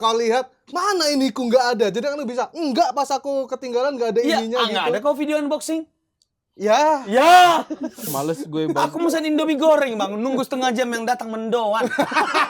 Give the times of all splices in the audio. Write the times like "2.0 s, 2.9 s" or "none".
8.1 s